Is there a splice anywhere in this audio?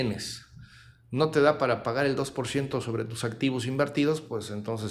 no; 0 cuts

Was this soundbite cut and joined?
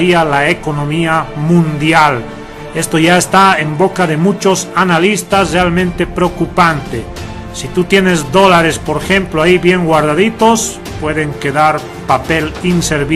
yes; 1 cut; at 8.1 s

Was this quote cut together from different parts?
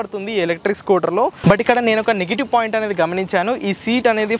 yes; 1 cut; at 1.4 s

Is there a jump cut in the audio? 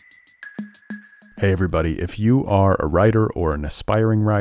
yes; 1 cut; at 1.0 s

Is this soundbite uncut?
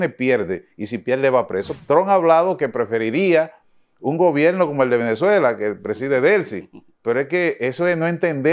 no; 1 cut; at 1.8 s

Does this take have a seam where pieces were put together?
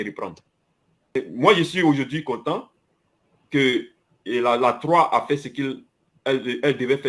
no; 0 cuts

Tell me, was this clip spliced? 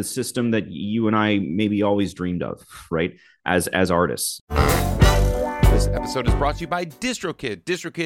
yes; 1 cut; at 4.3 s

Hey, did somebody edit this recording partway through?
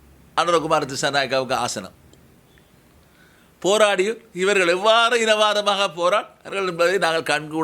no; 0 cuts

